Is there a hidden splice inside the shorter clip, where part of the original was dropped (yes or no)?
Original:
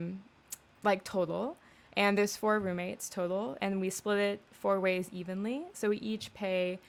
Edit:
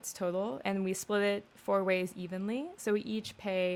no